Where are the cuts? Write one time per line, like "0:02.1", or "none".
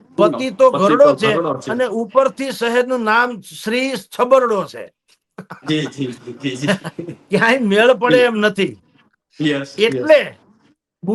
none